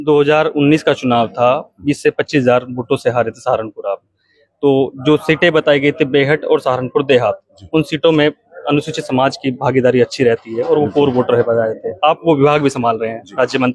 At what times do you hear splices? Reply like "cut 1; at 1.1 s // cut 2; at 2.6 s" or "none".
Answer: none